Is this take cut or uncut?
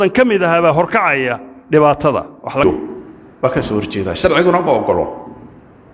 cut